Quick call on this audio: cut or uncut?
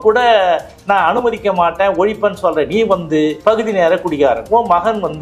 cut